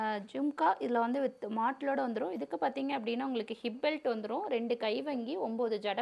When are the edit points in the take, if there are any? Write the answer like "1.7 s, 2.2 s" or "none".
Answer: none